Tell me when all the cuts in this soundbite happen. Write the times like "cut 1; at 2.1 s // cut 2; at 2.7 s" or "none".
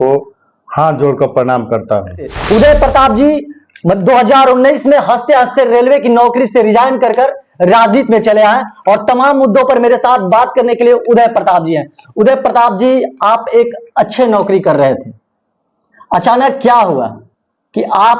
cut 1; at 2.3 s